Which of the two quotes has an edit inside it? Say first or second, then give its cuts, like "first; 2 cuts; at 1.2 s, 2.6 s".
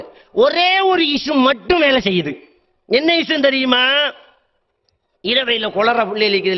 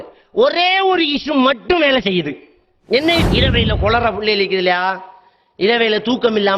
second; 1 cut; at 3.3 s